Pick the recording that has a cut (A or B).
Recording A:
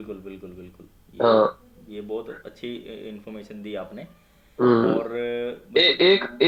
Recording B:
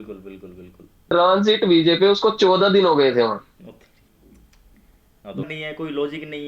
B